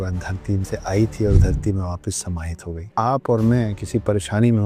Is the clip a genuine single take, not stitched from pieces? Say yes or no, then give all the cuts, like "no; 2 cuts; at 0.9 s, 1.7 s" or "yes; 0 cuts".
no; 1 cut; at 2.9 s